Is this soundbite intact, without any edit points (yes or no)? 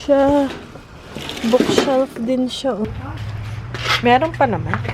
no